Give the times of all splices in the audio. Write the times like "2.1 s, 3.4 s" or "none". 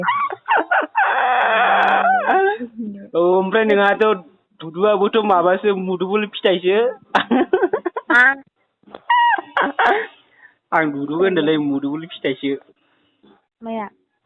none